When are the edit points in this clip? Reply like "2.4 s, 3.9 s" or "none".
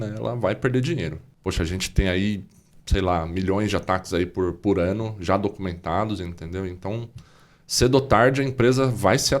1.2 s